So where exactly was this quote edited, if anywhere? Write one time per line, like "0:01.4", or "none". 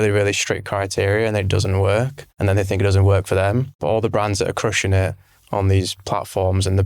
0:02.2
0:03.7